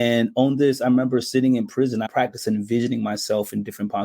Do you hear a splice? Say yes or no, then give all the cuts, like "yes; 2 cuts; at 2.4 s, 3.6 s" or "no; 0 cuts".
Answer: yes; 1 cut; at 2.1 s